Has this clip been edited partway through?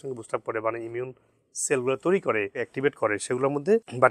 yes; 1 cut; at 2.6 s

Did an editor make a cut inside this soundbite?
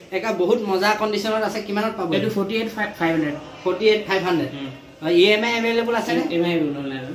no; 0 cuts

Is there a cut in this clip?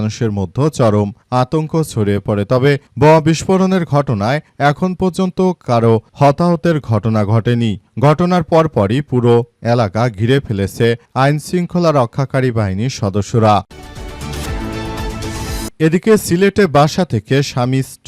yes; 2 cuts; at 13.7 s, 15.7 s

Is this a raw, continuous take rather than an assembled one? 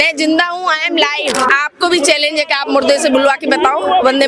no; 1 cut; at 1.5 s

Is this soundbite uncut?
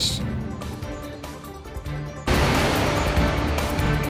yes; 0 cuts

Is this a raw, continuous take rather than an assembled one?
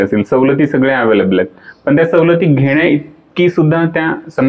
yes; 0 cuts

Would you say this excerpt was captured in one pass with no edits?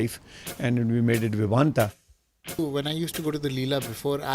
no; 1 cut; at 2.3 s

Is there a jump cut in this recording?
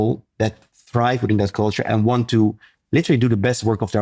no; 0 cuts

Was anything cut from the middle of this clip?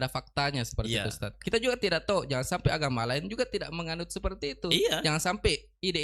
yes; 1 cut; at 1.3 s

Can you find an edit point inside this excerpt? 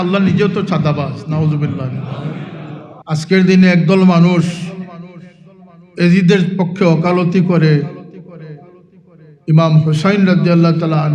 yes; 1 cut; at 2.9 s

